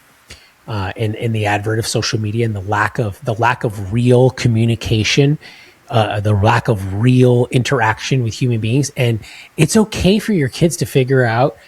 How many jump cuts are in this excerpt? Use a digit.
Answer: 0